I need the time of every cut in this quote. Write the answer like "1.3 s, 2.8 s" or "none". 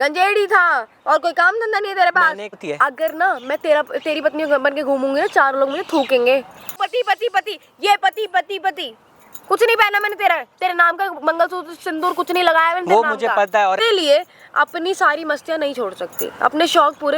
2.6 s, 6.8 s, 13.8 s